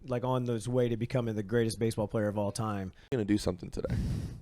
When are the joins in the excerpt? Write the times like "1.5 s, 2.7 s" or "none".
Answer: 3.1 s